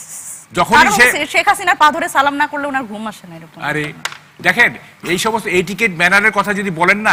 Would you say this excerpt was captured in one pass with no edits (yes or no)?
yes